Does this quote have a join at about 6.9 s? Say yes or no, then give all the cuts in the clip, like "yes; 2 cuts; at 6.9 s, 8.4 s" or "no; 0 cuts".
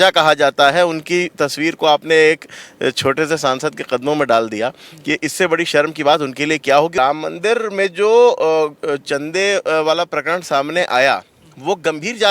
yes; 1 cut; at 6.9 s